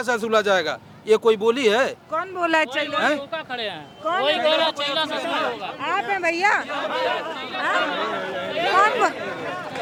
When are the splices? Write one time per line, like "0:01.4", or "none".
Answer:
none